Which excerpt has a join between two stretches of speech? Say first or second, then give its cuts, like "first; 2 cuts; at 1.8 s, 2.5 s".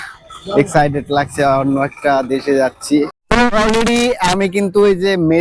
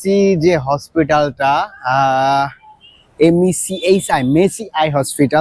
first; 1 cut; at 3.2 s